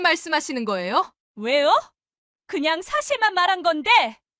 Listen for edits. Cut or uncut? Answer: cut